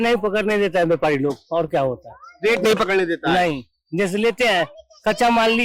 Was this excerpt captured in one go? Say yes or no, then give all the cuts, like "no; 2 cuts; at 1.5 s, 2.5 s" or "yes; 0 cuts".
yes; 0 cuts